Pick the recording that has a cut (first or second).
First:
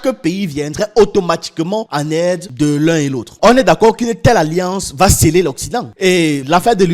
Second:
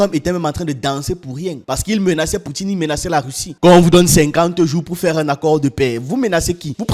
first